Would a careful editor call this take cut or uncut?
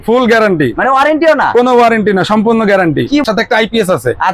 cut